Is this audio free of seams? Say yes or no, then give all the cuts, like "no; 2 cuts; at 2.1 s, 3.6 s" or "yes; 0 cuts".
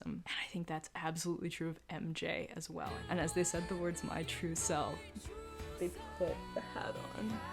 no; 1 cut; at 2.8 s